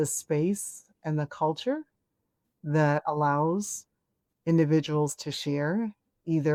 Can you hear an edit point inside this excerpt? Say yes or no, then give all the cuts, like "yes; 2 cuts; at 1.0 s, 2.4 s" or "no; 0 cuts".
no; 0 cuts